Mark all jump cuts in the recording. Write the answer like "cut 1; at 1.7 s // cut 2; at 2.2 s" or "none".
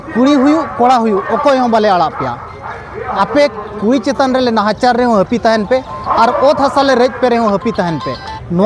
none